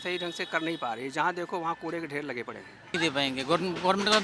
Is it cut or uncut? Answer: cut